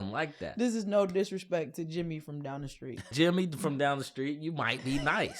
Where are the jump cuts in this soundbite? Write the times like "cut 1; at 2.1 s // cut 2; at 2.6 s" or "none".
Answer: cut 1; at 3.1 s